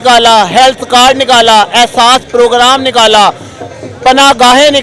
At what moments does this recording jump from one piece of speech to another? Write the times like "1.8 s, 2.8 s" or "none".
none